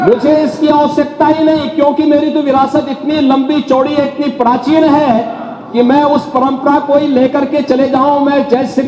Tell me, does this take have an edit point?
no; 0 cuts

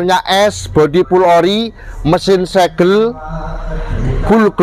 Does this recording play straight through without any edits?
yes; 0 cuts

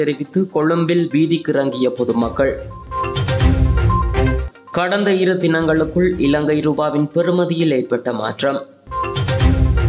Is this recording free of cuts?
no; 1 cut; at 8.8 s

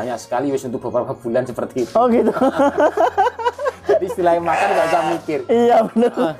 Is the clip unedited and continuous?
yes; 0 cuts

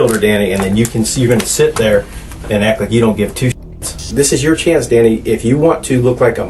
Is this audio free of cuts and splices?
no; 1 cut; at 4.0 s

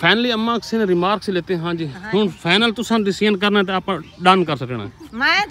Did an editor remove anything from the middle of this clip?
no; 0 cuts

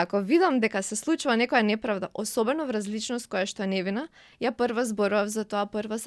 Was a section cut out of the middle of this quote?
no; 0 cuts

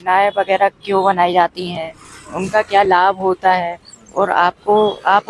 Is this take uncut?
yes; 0 cuts

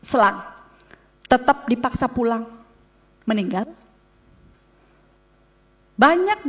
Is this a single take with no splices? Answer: yes; 0 cuts

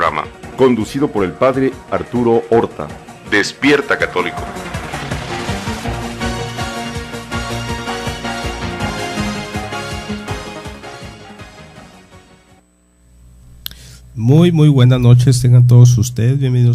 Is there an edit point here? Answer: no; 0 cuts

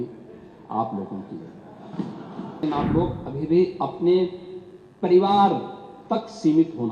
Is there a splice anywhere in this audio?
yes; 1 cut; at 2.6 s

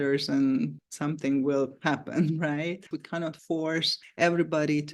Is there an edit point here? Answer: yes; 1 cut; at 2.9 s

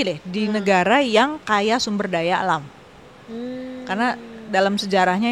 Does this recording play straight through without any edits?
yes; 0 cuts

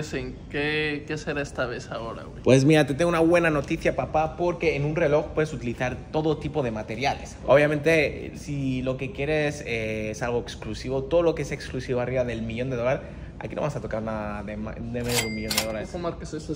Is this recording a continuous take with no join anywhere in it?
yes; 0 cuts

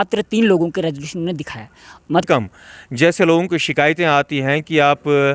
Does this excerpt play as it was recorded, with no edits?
no; 1 cut; at 2.2 s

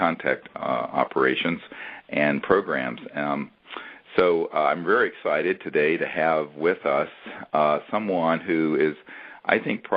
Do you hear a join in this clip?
yes; 1 cut; at 4.5 s

